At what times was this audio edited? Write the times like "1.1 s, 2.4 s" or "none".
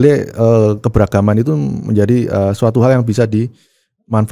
none

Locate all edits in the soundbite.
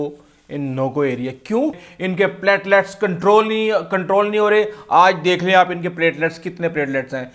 1.8 s

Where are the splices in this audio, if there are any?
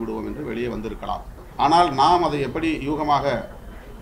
1.4 s

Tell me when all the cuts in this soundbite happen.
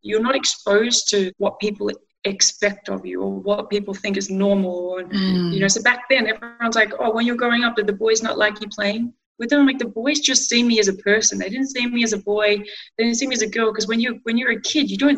1.3 s

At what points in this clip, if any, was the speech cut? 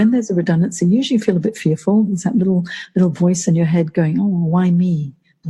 none

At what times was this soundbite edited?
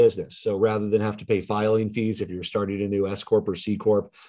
none

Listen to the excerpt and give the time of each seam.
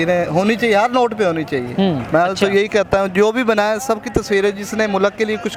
none

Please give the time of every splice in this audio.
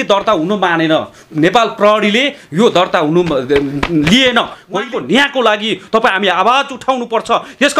4.6 s

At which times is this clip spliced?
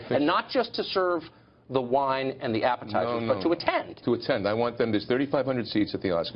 4.7 s

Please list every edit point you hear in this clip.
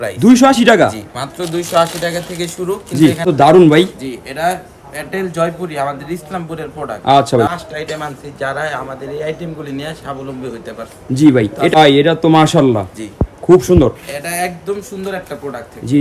3.2 s, 7.5 s, 11.8 s

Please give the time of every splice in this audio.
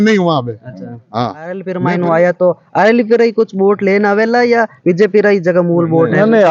1.7 s

